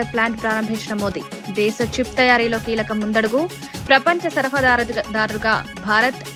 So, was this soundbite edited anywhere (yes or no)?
no